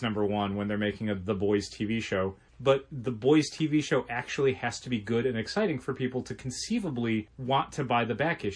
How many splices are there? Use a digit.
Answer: 2